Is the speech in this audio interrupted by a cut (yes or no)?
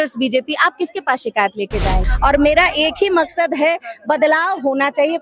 yes